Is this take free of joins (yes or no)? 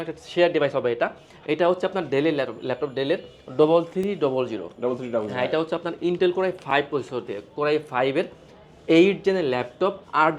yes